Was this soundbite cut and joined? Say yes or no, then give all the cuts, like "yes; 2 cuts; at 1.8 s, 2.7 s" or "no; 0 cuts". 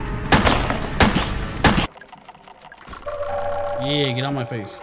yes; 1 cut; at 1.9 s